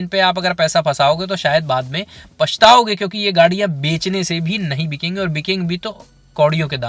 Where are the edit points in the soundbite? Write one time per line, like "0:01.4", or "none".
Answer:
none